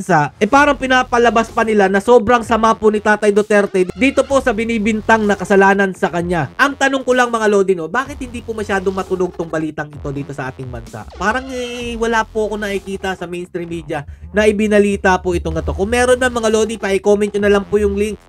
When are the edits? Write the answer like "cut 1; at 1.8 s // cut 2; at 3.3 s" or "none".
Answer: cut 1; at 6.5 s